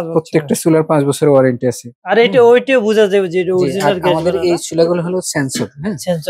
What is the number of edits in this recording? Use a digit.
1